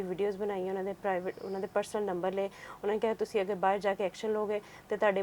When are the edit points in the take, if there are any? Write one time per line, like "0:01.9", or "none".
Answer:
none